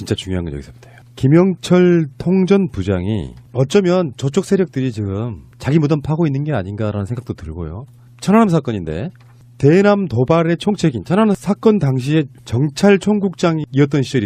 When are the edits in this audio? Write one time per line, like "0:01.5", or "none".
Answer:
0:01.7

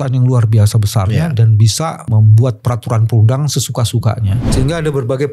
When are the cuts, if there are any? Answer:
0:02.1
0:04.4

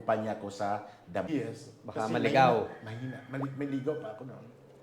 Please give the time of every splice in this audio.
0:01.3

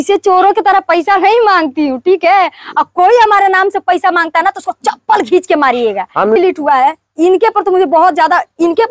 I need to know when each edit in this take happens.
0:06.4

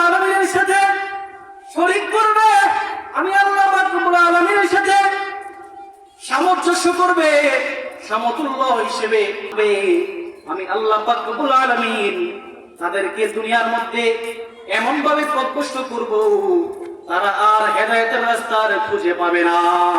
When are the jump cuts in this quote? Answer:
0:09.5

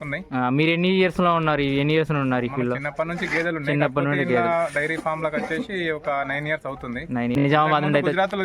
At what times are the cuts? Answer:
0:07.4

